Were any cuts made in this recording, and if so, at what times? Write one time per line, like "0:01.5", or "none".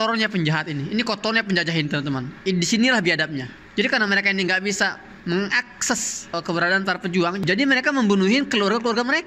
none